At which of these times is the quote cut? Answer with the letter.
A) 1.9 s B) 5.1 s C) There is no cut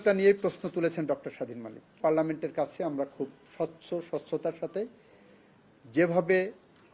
A